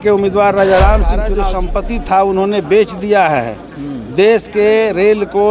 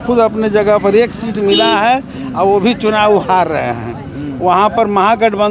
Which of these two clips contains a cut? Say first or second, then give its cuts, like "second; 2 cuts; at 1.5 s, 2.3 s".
first; 1 cut; at 1.3 s